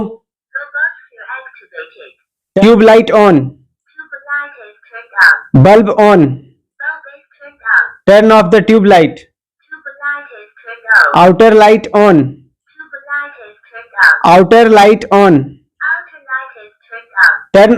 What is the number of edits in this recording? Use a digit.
1